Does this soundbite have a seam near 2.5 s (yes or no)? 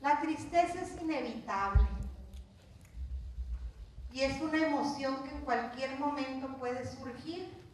yes